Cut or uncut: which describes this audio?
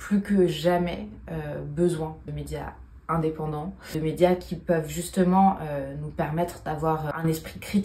uncut